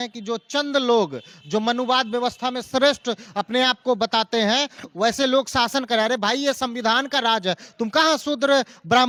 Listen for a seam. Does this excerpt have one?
no; 0 cuts

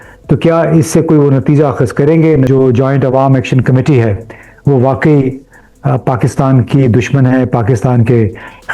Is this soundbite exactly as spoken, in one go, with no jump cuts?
no; 1 cut; at 2.5 s

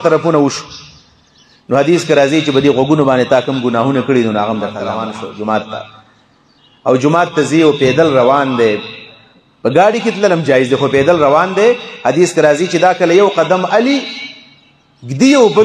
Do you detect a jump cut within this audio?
yes; 1 cut; at 5.0 s

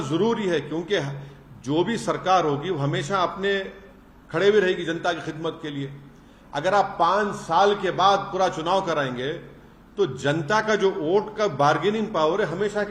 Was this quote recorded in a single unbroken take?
yes; 0 cuts

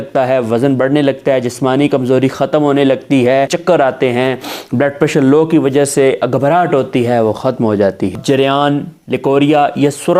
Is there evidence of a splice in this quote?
yes; 2 cuts; at 3.6 s, 8.2 s

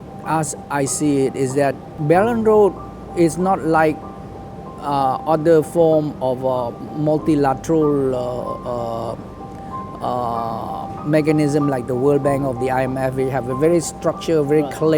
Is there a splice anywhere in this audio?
yes; 1 cut; at 1.9 s

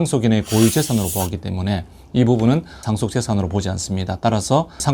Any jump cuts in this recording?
no; 0 cuts

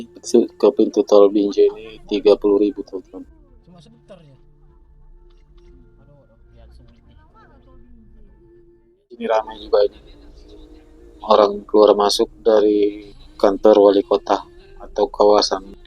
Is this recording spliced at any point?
yes; 1 cut; at 9.2 s

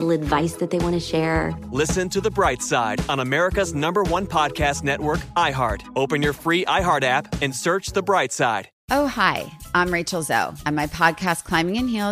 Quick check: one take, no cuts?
no; 1 cut; at 8.7 s

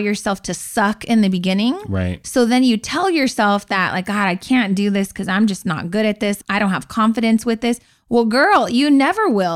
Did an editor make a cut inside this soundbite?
no; 0 cuts

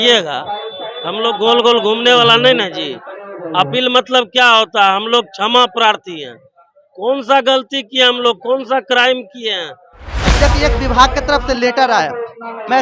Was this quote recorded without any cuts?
no; 1 cut; at 10.2 s

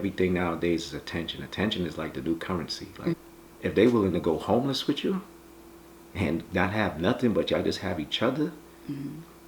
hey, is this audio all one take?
no; 1 cut; at 3.1 s

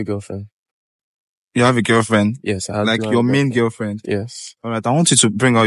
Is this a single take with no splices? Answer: yes; 0 cuts

